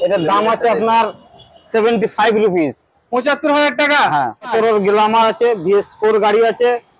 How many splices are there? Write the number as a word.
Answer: one